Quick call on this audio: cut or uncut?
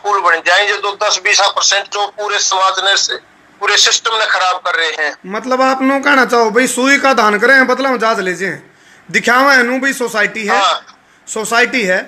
uncut